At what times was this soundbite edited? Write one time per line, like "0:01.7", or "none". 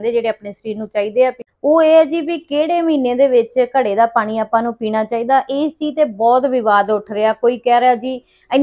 0:01.5